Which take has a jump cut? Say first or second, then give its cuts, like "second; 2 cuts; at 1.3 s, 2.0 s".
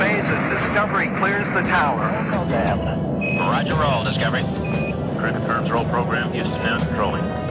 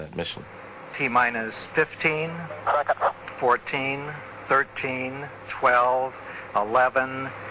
first; 1 cut; at 1.1 s